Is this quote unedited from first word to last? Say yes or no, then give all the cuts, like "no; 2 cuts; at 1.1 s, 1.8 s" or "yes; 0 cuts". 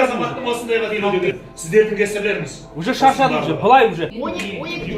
no; 2 cuts; at 1.1 s, 4.1 s